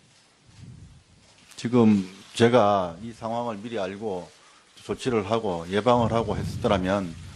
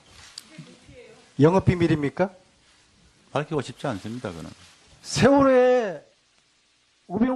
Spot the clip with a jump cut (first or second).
second